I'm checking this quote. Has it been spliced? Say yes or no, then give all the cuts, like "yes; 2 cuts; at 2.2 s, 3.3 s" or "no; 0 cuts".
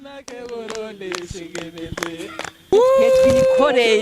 yes; 1 cut; at 2.7 s